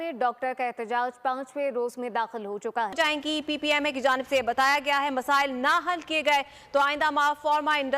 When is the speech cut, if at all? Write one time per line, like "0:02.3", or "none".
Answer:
0:03.0

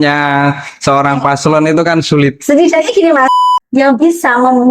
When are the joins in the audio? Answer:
0:03.4

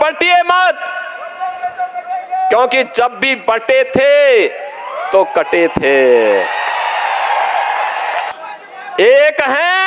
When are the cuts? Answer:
0:08.3

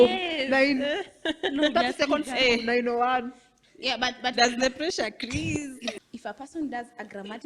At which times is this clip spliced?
0:06.1

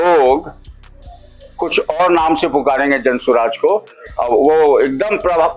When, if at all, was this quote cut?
none

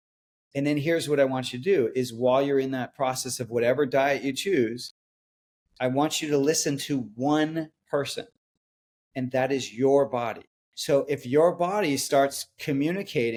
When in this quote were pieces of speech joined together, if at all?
none

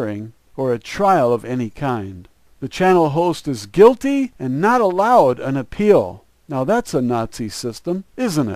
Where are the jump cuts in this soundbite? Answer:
0:06.6

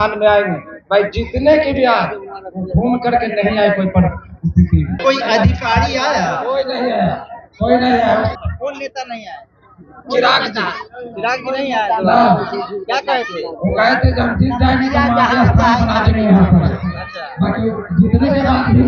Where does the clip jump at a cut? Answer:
0:05.0
0:08.3

